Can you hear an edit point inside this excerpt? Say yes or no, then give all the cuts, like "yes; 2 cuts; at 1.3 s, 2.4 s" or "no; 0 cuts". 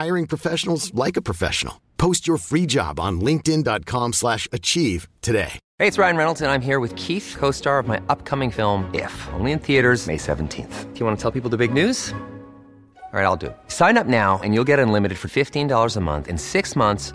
yes; 1 cut; at 5.6 s